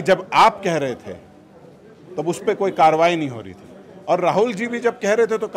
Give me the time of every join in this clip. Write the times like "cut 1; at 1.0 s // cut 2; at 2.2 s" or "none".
none